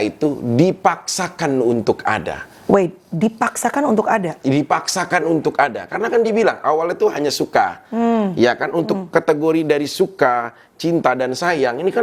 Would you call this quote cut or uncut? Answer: uncut